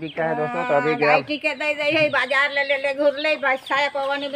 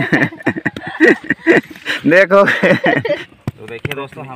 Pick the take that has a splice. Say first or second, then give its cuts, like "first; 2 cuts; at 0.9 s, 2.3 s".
second; 1 cut; at 3.3 s